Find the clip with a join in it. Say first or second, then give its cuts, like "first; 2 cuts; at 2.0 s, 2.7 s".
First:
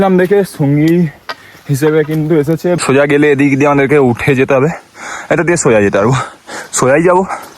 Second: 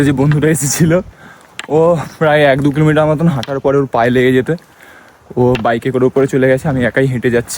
first; 1 cut; at 2.8 s